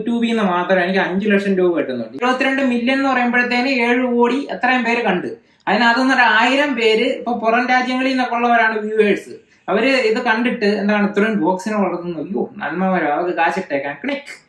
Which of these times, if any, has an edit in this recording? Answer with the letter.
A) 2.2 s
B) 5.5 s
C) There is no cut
A